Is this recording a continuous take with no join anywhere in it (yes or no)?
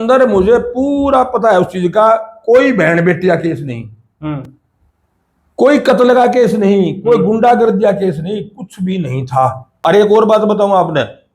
no